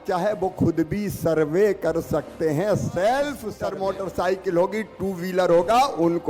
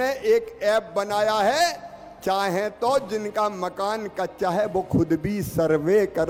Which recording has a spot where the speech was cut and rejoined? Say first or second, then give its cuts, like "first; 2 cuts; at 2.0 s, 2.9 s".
first; 1 cut; at 3.5 s